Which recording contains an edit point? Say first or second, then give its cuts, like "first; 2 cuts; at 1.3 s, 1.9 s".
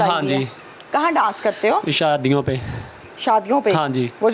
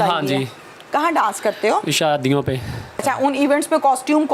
second; 1 cut; at 3.0 s